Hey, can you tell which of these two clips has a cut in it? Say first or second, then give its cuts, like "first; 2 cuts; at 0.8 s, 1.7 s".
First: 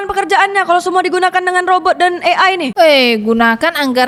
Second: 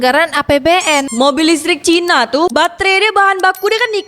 second; 2 cuts; at 1.1 s, 2.5 s